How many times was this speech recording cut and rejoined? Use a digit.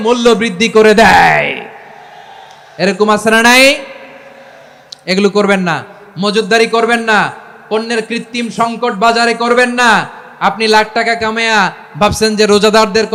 0